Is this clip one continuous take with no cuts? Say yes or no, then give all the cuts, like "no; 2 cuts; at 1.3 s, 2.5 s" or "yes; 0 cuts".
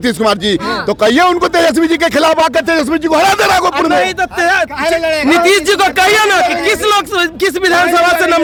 yes; 0 cuts